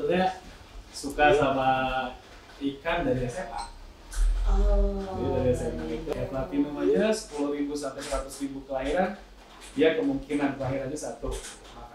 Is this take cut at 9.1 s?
no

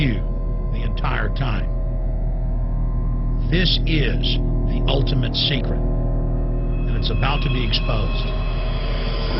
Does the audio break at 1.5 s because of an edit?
yes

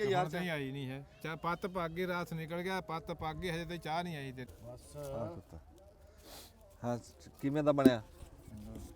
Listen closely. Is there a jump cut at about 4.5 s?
yes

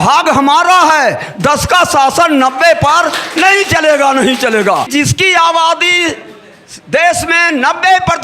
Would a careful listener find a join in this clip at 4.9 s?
yes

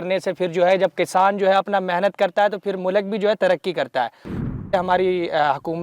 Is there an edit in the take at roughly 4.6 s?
yes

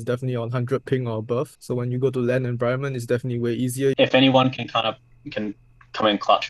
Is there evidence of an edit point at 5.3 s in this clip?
no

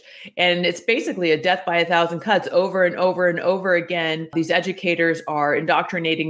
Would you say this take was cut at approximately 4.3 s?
yes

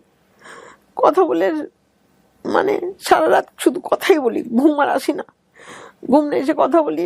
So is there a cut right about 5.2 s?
no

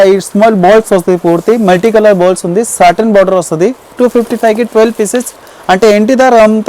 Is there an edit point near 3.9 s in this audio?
yes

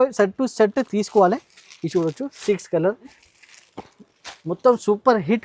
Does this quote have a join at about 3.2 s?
yes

